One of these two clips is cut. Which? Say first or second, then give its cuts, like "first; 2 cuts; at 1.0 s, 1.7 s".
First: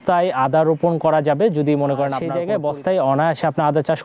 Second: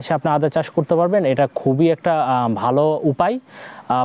first; 1 cut; at 2.3 s